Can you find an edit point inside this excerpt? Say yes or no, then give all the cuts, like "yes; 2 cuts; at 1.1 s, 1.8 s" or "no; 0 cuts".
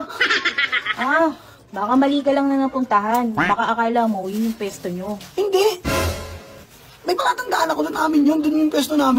no; 0 cuts